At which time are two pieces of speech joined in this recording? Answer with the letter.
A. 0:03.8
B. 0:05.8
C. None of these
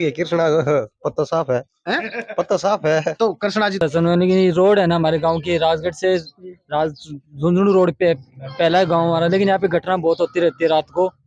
A